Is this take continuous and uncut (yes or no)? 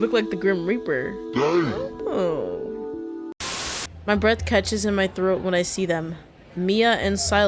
no